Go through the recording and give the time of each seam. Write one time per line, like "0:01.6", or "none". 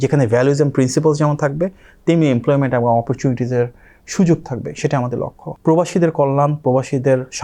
0:05.5